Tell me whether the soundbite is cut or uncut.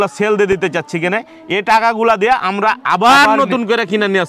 uncut